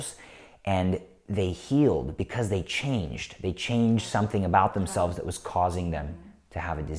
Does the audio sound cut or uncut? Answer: uncut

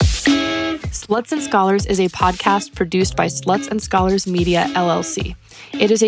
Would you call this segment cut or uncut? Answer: cut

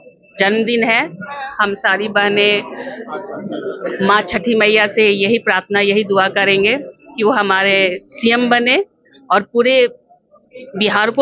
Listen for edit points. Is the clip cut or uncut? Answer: uncut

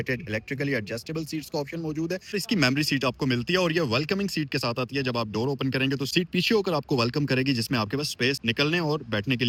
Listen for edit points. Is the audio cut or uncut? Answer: uncut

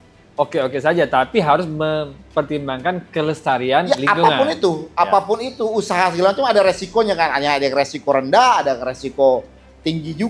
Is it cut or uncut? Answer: uncut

